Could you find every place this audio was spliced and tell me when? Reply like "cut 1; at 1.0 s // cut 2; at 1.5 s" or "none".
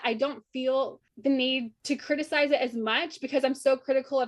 cut 1; at 1.0 s // cut 2; at 1.7 s